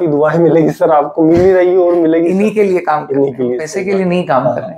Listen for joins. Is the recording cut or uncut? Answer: cut